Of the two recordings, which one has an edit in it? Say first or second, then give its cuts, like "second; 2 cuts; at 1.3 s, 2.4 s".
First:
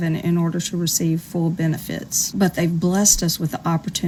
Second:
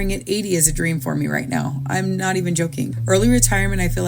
second; 1 cut; at 2.9 s